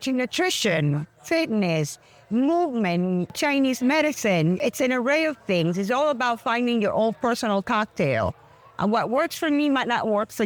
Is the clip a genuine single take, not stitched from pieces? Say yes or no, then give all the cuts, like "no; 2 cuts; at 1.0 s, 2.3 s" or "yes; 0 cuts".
yes; 0 cuts